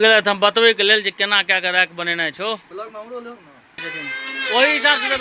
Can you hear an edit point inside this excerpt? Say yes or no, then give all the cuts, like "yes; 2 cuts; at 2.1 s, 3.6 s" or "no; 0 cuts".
yes; 1 cut; at 3.8 s